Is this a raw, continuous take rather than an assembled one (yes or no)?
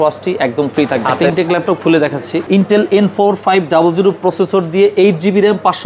no